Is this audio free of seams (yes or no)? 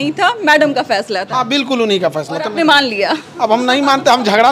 yes